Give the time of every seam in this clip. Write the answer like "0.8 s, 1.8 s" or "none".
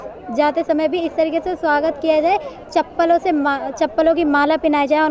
none